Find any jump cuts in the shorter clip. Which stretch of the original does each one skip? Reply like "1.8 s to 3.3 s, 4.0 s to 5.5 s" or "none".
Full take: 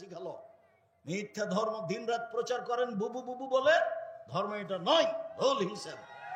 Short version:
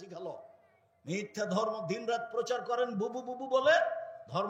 none